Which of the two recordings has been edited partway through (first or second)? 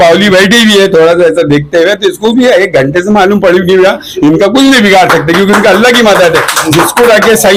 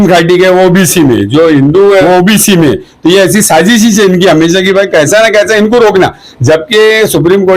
second